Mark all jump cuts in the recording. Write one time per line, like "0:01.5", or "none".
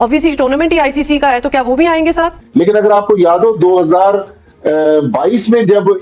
0:02.4

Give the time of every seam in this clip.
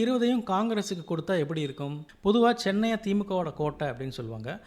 0:02.0

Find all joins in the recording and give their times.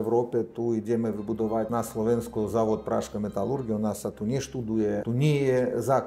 0:01.7
0:05.0

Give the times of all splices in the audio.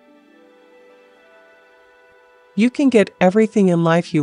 0:01.5

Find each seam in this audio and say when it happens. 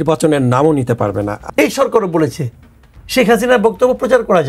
0:01.4

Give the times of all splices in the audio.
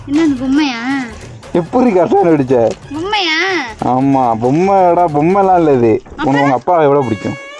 none

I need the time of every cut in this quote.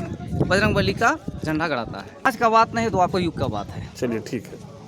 0:02.3

